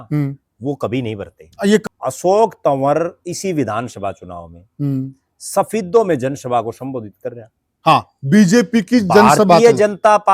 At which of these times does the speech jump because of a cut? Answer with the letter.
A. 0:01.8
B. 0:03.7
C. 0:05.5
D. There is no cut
A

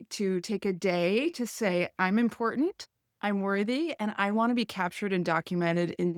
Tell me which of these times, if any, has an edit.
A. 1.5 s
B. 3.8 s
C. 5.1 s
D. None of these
D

